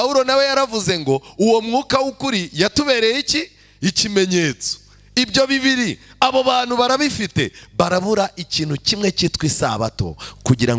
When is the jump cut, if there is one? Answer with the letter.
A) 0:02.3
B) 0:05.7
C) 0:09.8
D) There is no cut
D